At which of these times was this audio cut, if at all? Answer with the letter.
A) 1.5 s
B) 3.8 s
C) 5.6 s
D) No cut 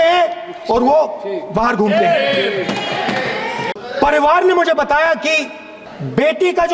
D